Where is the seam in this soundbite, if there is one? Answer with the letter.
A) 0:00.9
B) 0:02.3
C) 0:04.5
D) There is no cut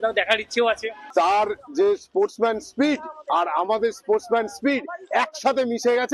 A